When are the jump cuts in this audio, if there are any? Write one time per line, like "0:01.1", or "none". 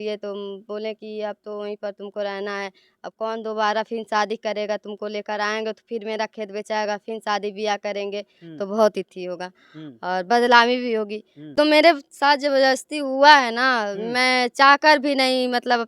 0:11.4